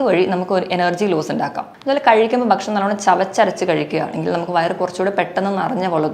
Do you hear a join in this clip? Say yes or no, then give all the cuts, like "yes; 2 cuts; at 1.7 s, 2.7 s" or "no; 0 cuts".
yes; 1 cut; at 1.7 s